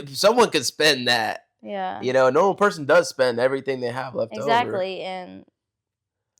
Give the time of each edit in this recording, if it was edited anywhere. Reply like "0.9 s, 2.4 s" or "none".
none

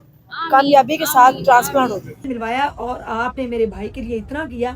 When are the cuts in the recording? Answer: 2.2 s

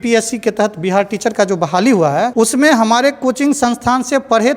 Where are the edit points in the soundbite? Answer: 2.3 s

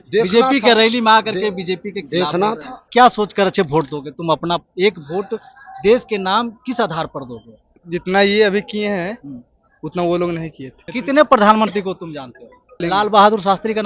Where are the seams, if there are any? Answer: 2.8 s, 7.8 s, 10.8 s, 12.8 s

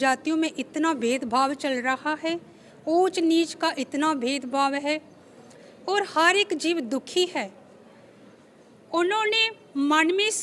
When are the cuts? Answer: none

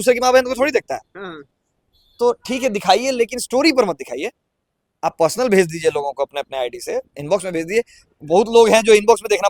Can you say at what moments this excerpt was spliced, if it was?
none

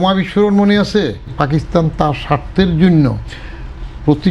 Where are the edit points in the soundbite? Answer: 1.3 s

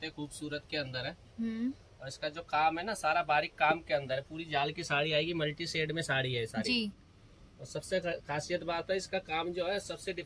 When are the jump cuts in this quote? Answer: none

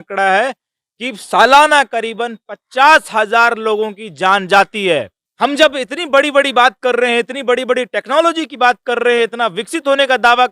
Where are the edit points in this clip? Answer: 5.2 s

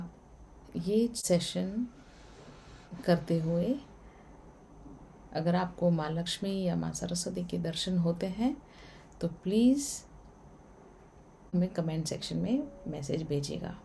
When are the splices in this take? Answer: 1.2 s, 11.5 s

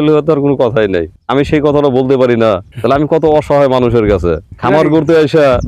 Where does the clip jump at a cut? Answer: 1.2 s, 2.7 s, 4.5 s

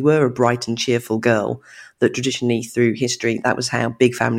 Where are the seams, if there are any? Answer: none

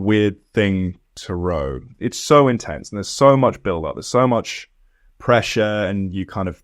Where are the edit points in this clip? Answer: 1.8 s

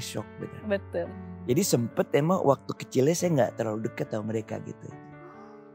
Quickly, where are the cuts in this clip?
1.1 s

